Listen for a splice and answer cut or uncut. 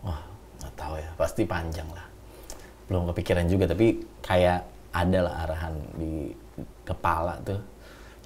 uncut